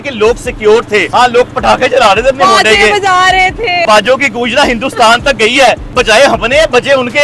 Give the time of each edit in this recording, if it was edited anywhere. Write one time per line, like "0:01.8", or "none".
0:01.1
0:03.8
0:06.0